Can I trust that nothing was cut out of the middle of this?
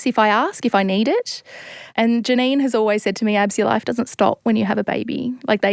no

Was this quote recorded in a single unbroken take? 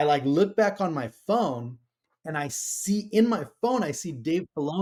yes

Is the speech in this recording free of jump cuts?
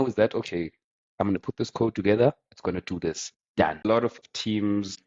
no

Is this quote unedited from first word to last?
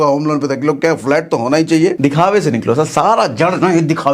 no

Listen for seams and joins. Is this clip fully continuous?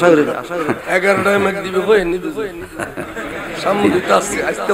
yes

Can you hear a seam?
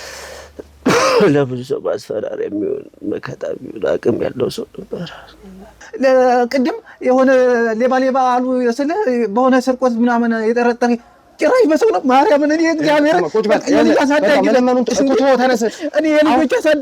yes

